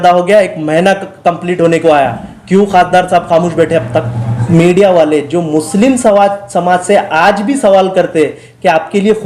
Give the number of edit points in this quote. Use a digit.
1